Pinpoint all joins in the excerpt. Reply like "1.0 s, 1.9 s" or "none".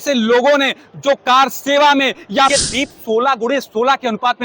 2.5 s

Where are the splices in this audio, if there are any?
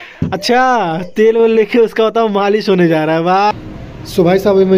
3.5 s

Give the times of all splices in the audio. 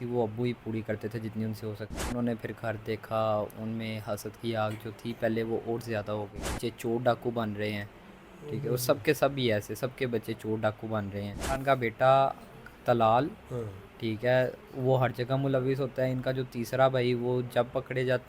1.9 s, 6.5 s, 11.6 s

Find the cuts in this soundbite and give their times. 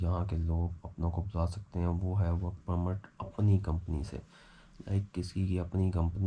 none

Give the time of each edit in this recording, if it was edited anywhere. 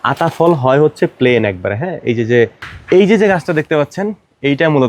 2.7 s

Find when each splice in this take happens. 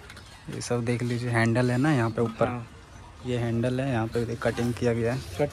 none

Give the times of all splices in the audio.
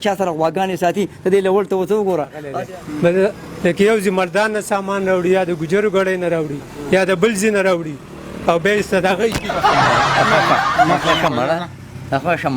2.4 s

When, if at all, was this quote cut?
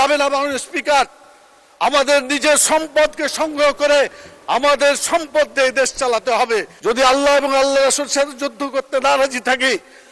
6.7 s

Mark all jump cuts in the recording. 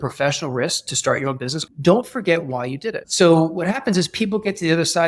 1.6 s, 3.0 s

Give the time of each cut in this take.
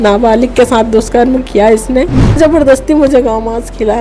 2.4 s

